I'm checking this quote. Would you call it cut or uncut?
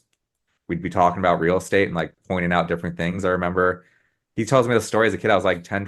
uncut